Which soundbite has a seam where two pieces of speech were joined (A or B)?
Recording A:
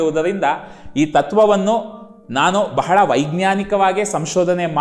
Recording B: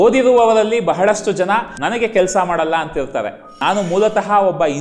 B